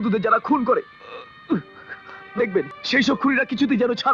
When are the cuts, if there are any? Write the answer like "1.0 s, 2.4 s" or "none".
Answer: 2.8 s